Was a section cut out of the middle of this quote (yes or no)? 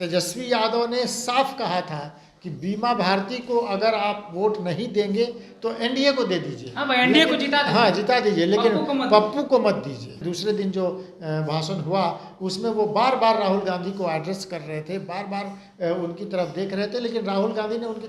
yes